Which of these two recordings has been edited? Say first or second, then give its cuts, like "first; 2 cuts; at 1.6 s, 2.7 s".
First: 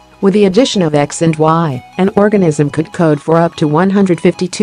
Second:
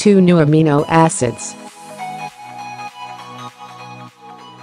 second; 1 cut; at 1.4 s